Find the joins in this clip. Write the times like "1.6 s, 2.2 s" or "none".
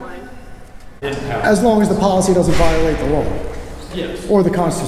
1.0 s